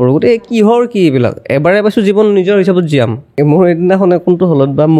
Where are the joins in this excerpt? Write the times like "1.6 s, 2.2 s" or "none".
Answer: 3.2 s